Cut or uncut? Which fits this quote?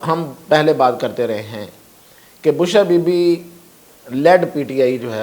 uncut